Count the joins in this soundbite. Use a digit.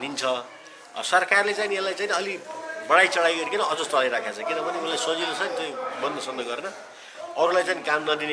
0